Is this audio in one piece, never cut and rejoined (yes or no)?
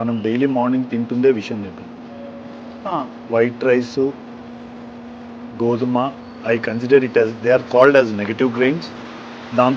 yes